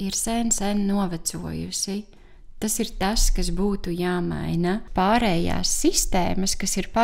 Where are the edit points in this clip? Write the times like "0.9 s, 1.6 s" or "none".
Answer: 4.9 s